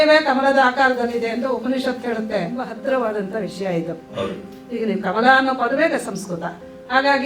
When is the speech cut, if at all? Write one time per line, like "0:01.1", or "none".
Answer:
0:02.6